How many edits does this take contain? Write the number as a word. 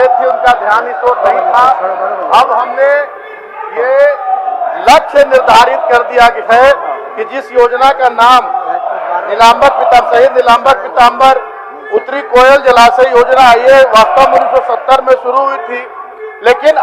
zero